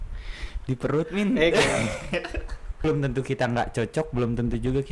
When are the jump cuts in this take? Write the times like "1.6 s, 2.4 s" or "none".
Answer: 2.8 s